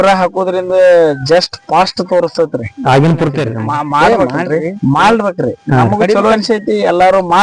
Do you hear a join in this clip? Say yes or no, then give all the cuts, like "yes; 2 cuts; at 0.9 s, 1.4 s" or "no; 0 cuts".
yes; 1 cut; at 3.6 s